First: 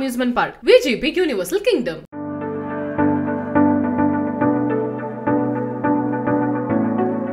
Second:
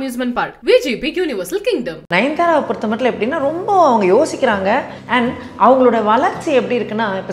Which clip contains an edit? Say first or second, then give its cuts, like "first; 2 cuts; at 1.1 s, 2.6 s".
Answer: second; 2 cuts; at 2.0 s, 5.0 s